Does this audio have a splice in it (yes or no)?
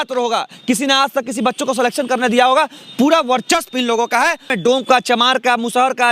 yes